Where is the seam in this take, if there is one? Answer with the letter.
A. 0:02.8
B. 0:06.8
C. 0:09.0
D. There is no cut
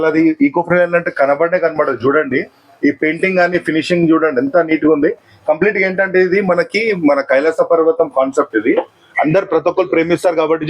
C